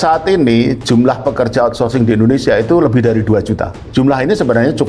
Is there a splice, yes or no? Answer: yes